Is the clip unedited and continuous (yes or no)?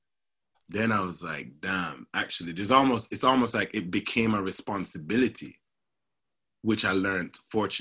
yes